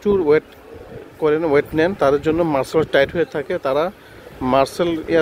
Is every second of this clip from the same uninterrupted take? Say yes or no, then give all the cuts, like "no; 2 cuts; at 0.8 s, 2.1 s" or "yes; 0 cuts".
yes; 0 cuts